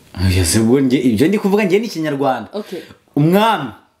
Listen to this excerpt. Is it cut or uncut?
uncut